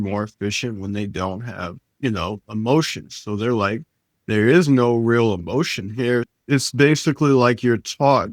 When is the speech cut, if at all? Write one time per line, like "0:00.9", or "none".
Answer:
0:06.3

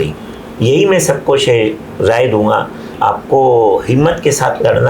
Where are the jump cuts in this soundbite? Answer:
0:03.0

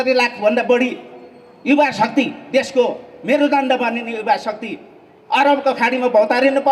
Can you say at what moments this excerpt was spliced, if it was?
none

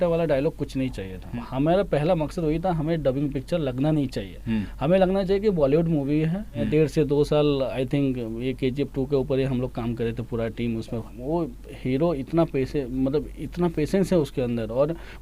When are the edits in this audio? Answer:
0:01.3
0:06.6
0:11.1

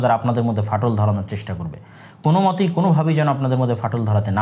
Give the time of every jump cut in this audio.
none

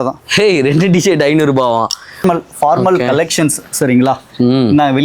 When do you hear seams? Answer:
0:02.2

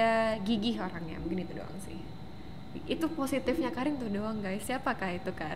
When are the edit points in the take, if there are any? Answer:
none

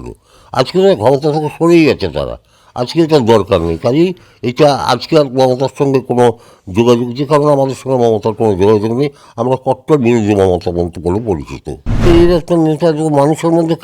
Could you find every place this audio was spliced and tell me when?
0:12.0

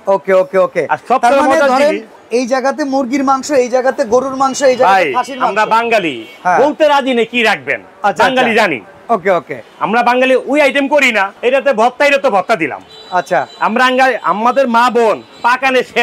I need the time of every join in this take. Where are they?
none

